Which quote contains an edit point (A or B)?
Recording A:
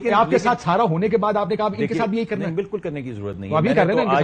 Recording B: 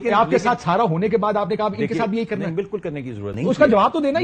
B